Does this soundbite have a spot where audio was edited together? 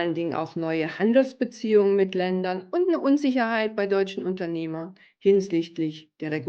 no; 0 cuts

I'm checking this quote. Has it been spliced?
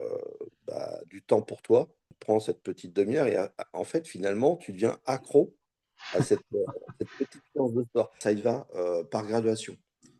yes; 2 cuts; at 2.1 s, 8.1 s

